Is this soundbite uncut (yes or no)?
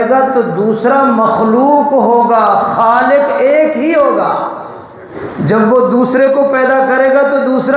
no